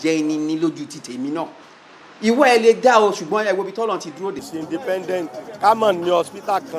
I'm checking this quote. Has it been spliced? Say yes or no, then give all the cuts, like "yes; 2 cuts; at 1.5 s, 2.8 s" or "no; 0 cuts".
yes; 1 cut; at 4.5 s